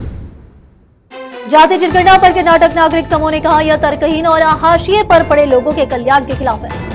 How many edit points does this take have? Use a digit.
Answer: 1